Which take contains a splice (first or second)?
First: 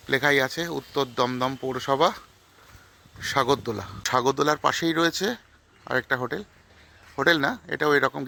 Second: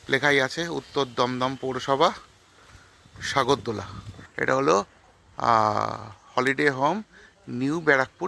second